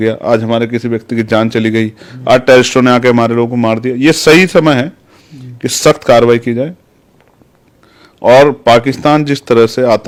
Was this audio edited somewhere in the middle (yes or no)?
no